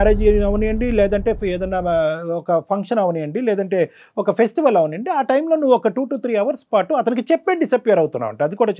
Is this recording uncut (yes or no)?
yes